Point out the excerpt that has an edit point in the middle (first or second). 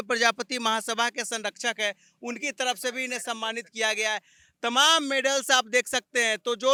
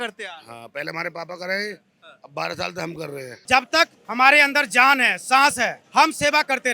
second